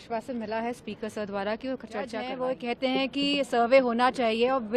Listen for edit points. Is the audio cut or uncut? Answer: cut